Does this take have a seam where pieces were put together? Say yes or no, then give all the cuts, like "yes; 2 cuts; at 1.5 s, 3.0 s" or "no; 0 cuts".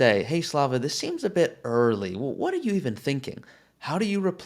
no; 0 cuts